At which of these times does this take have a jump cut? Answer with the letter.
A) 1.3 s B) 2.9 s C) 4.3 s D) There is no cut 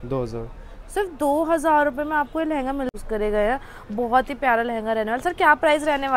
B